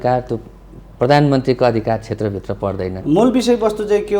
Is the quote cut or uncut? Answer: cut